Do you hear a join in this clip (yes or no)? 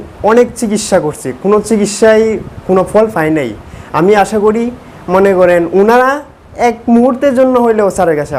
no